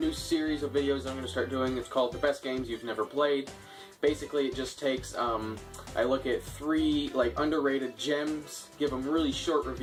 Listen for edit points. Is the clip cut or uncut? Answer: uncut